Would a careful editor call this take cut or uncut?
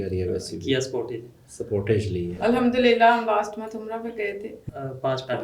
cut